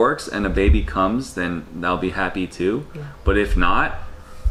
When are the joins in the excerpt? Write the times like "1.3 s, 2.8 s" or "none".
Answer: none